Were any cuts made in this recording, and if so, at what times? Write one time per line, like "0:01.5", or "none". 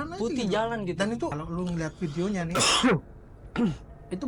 0:01.4

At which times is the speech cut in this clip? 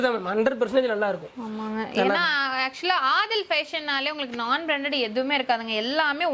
none

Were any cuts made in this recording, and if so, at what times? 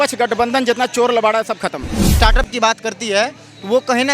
0:02.1

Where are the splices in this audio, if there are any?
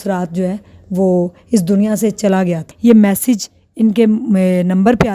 0:02.6

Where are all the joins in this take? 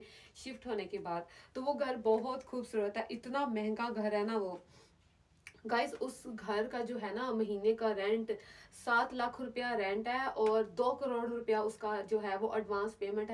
none

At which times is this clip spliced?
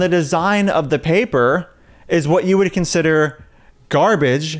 none

